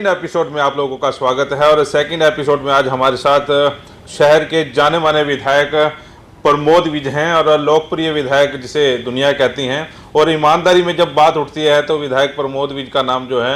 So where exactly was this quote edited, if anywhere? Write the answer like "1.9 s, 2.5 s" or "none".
none